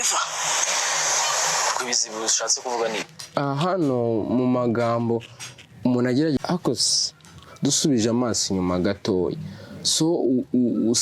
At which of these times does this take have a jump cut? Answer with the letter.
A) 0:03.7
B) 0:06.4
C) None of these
B